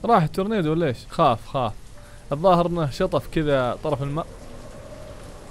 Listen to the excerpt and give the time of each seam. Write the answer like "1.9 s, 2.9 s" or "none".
1.0 s